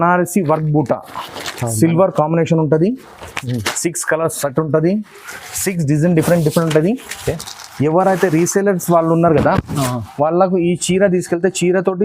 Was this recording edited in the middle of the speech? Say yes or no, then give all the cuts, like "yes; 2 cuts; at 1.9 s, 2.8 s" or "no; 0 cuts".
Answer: no; 0 cuts